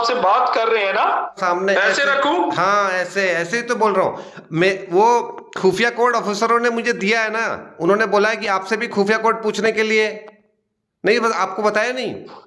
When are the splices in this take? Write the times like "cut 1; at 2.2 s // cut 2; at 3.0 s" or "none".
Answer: cut 1; at 1.4 s